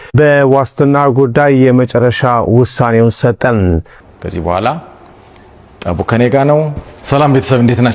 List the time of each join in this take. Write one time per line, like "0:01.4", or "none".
0:04.1

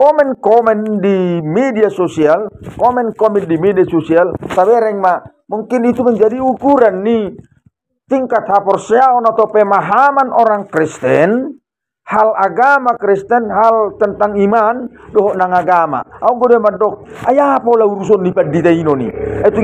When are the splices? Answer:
none

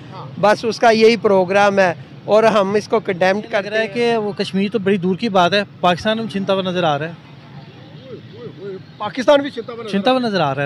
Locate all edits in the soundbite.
0:03.7

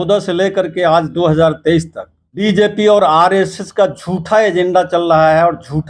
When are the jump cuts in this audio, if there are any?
0:02.4

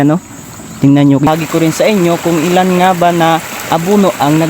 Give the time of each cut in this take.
0:01.3

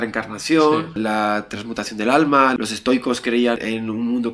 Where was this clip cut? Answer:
0:01.0
0:02.5
0:03.6

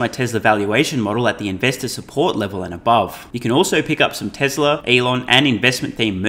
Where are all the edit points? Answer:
0:03.3
0:04.8

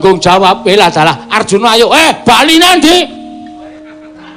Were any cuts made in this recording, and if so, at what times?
0:02.8

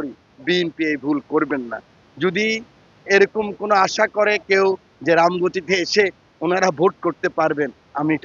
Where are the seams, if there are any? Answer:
none

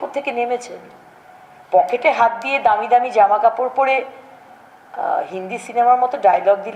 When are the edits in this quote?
none

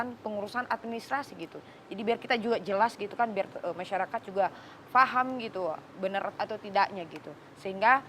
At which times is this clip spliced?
none

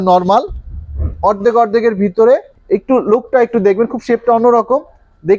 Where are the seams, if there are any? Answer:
0:02.5

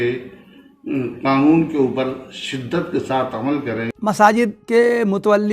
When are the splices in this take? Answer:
0:03.9
0:04.6

